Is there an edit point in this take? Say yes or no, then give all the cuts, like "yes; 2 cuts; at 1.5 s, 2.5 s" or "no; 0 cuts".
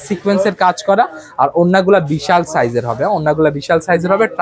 no; 0 cuts